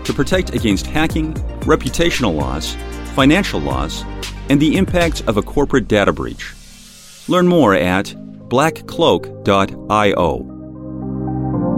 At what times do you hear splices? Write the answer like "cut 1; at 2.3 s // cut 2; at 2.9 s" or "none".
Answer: cut 1; at 10.9 s